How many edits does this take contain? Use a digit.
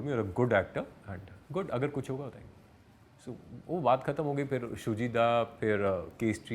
0